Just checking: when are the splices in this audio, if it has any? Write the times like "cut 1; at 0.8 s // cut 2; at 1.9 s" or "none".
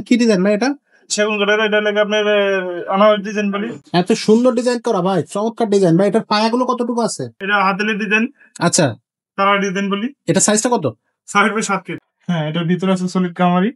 cut 1; at 3.7 s // cut 2; at 7.4 s // cut 3; at 12.0 s